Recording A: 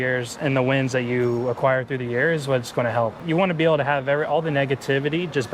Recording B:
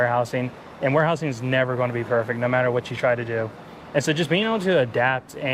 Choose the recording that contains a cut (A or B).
A